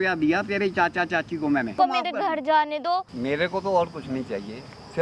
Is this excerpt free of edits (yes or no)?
no